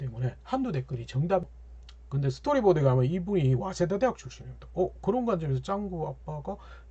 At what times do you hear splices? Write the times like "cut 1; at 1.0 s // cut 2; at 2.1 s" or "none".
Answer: cut 1; at 1.6 s